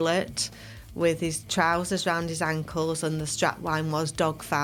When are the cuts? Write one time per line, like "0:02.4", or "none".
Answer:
none